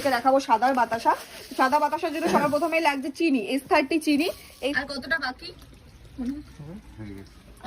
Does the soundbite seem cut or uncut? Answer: cut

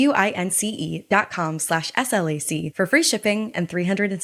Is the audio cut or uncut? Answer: uncut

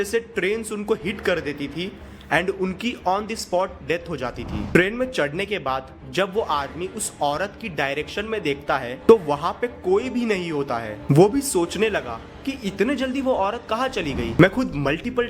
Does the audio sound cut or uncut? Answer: cut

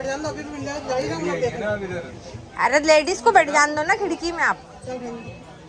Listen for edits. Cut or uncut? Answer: uncut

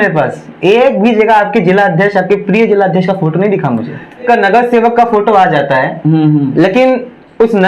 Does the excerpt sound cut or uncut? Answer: cut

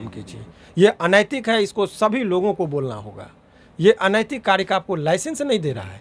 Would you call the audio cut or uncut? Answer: uncut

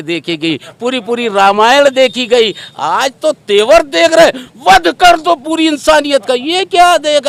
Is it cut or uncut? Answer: uncut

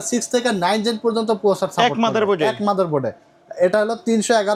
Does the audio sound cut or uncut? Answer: uncut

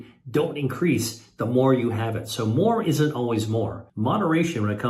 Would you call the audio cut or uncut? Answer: cut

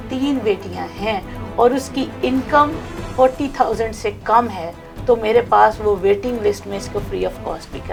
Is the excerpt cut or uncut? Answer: uncut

